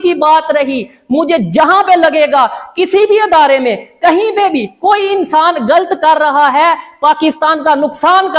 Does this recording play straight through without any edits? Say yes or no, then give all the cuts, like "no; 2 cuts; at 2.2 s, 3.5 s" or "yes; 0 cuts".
yes; 0 cuts